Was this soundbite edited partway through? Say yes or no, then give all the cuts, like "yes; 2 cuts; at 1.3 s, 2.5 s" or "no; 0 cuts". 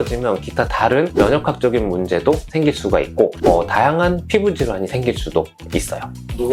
no; 0 cuts